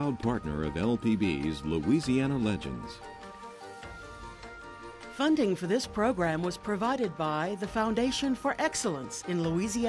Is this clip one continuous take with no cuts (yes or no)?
no